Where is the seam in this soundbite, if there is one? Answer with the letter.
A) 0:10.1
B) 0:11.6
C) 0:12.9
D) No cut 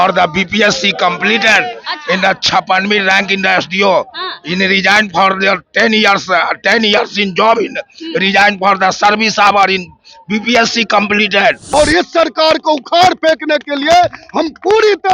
B